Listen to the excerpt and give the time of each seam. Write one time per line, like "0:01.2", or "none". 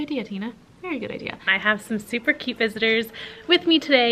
0:01.4